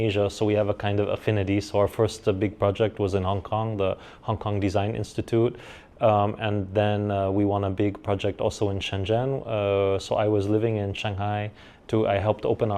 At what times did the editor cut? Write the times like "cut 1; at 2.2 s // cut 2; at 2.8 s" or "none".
none